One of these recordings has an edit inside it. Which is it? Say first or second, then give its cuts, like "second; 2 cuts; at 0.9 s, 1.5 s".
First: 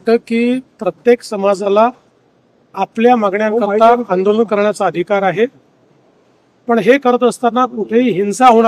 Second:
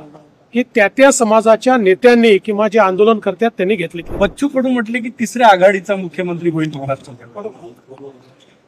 second; 1 cut; at 4.1 s